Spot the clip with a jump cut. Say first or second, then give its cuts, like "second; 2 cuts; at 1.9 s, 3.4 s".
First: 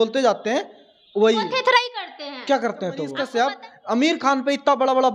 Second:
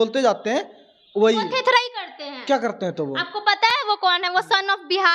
first; 1 cut; at 3.1 s